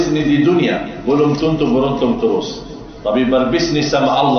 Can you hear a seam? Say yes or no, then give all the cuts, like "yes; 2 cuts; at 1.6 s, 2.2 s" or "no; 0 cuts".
no; 0 cuts